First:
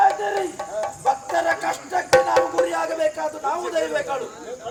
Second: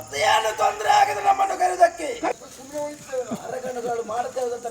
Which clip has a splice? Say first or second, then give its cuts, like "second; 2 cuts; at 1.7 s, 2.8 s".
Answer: second; 1 cut; at 2.3 s